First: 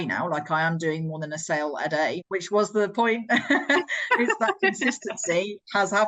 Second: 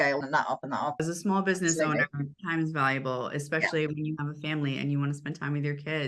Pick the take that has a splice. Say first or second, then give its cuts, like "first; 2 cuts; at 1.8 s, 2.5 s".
second; 1 cut; at 1.0 s